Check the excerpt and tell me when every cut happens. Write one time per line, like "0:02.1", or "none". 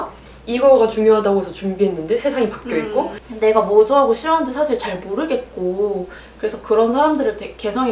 0:03.2